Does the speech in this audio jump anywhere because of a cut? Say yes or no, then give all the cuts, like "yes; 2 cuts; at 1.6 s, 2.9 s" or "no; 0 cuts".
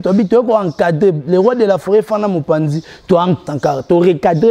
yes; 1 cut; at 3.4 s